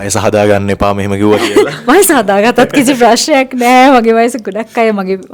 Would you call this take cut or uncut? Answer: uncut